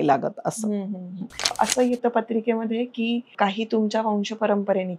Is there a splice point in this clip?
yes; 2 cuts; at 1.5 s, 3.3 s

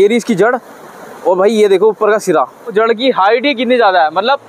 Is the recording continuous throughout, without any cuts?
no; 1 cut; at 2.6 s

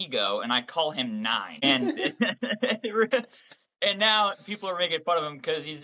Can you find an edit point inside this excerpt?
yes; 1 cut; at 1.5 s

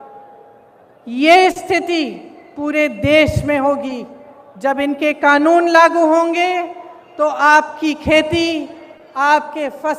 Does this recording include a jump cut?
no; 0 cuts

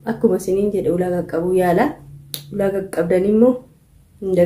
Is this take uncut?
yes; 0 cuts

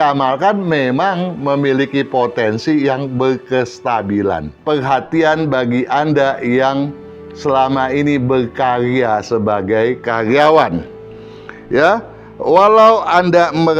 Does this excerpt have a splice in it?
yes; 1 cut; at 4.5 s

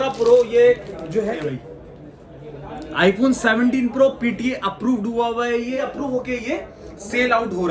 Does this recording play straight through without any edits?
no; 2 cuts; at 1.4 s, 5.8 s

